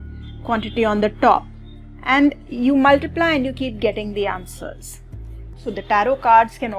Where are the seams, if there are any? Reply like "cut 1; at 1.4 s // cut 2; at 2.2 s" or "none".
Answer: cut 1; at 5.7 s